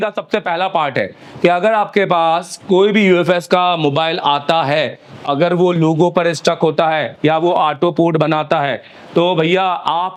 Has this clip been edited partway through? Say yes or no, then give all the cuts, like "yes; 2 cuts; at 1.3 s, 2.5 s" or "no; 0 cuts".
no; 0 cuts